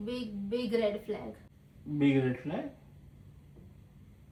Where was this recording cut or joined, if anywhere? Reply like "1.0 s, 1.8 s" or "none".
none